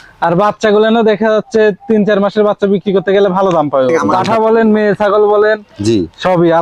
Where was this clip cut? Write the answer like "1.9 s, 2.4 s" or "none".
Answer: 4.0 s